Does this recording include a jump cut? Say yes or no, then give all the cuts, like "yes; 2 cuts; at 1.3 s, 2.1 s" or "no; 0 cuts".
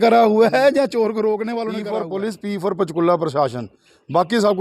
yes; 1 cut; at 1.9 s